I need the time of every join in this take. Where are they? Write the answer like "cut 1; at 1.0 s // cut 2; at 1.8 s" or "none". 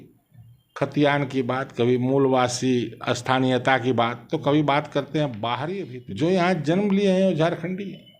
cut 1; at 5.7 s